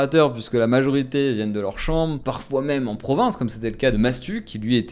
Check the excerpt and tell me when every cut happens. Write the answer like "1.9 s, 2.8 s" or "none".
none